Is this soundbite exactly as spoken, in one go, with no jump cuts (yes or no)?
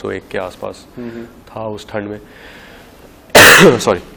yes